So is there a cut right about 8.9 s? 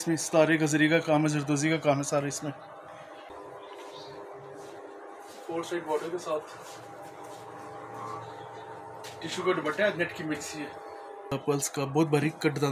no; 2 cuts; at 3.3 s, 11.3 s

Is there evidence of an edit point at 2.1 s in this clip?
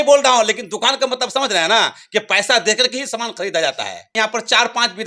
no; 1 cut; at 4.1 s

